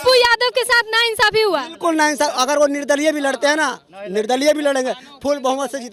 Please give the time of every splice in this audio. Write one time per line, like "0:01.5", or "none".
none